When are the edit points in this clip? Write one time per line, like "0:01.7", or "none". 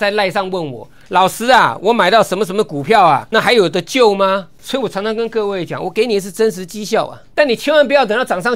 0:03.3
0:04.6
0:07.2